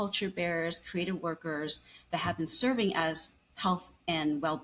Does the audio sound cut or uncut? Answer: uncut